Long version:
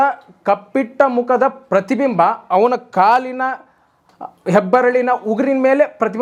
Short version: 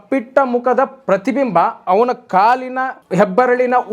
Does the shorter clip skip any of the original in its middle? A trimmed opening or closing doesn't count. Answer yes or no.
yes